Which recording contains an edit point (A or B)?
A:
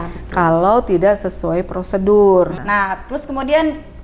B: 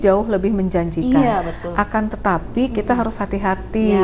A